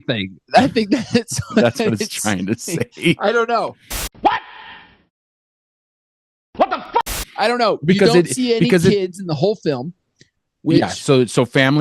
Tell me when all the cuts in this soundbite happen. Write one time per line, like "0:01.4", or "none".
none

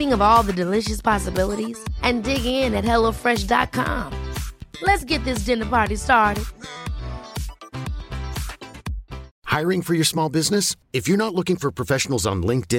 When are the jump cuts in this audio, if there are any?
0:09.3

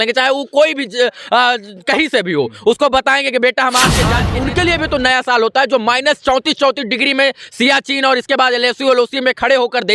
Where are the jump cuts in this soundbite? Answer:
0:04.3

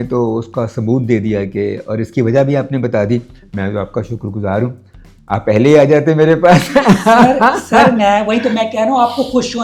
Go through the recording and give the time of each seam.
none

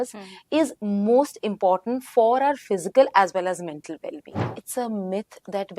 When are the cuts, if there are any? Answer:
0:04.6

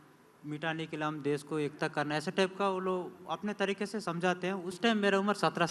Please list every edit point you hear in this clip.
0:04.8

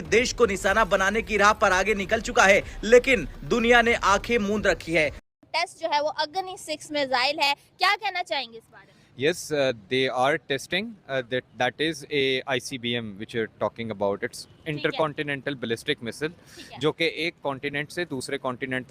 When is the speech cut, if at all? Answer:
0:05.2

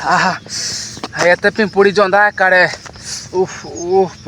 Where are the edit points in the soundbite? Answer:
none

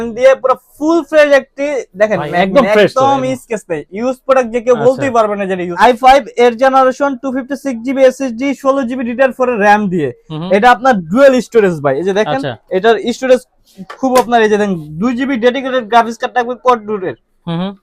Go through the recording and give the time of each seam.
0:05.7

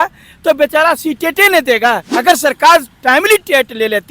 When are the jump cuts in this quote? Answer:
0:02.1

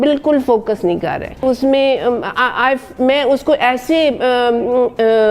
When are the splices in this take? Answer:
0:01.4

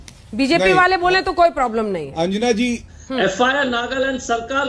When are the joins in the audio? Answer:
0:02.9

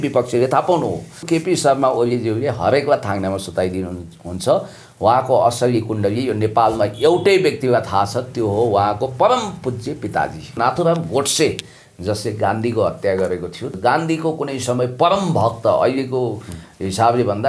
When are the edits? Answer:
0:01.2
0:10.6
0:13.7

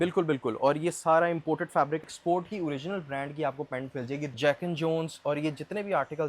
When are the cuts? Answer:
0:02.0
0:04.3

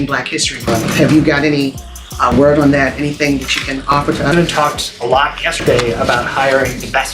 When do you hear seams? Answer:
0:04.3

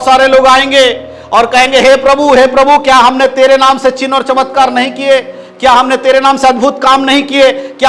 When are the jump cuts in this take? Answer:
none

